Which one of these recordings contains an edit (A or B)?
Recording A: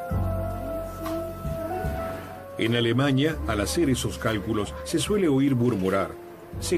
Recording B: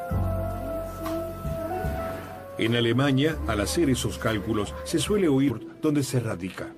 A